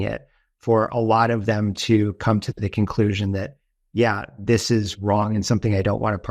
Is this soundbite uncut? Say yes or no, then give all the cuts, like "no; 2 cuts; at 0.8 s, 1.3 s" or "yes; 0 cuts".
yes; 0 cuts